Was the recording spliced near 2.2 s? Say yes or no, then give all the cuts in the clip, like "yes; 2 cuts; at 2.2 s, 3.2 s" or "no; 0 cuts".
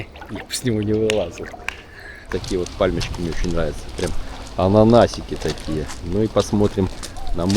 yes; 1 cut; at 2.2 s